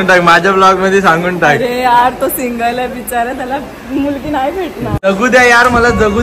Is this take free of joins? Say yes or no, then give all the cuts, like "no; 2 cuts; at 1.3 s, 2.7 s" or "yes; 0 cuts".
no; 1 cut; at 5.0 s